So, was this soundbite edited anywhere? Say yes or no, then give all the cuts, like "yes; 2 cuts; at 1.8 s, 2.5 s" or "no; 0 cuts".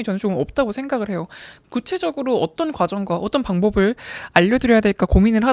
no; 0 cuts